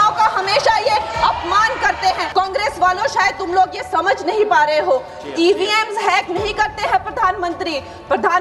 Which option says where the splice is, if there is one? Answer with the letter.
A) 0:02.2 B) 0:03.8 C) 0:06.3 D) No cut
A